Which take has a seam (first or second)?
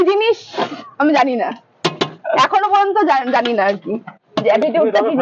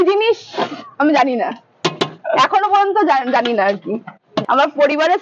second